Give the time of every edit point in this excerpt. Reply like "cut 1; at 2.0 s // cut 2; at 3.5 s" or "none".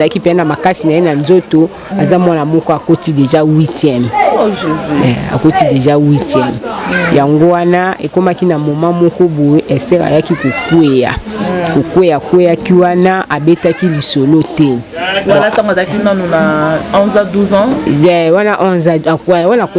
none